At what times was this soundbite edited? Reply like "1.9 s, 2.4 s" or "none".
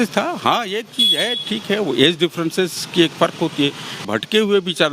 3.9 s